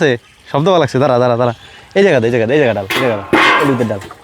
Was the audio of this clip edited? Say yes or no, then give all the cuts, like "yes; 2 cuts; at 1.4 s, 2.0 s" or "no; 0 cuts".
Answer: no; 0 cuts